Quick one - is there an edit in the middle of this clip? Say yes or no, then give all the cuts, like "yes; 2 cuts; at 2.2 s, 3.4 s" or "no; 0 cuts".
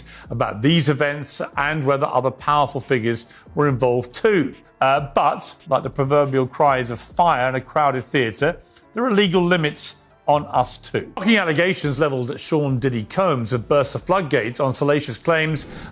yes; 2 cuts; at 4.6 s, 11.1 s